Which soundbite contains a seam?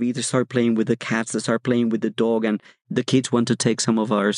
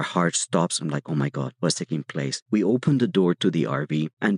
first; 1 cut; at 2.8 s

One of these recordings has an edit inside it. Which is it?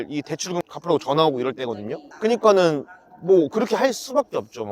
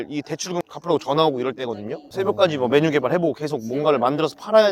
second; 1 cut; at 2.0 s

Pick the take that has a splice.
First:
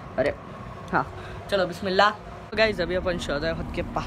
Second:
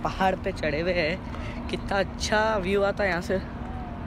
first; 1 cut; at 2.5 s

